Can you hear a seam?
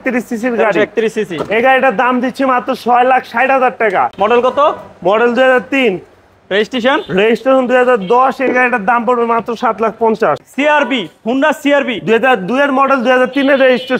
yes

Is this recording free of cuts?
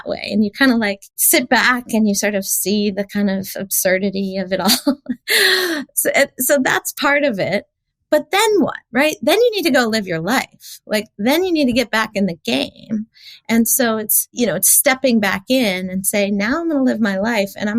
no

